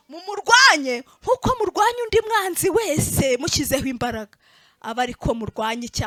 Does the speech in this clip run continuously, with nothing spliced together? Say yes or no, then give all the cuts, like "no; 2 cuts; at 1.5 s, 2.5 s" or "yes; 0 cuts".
yes; 0 cuts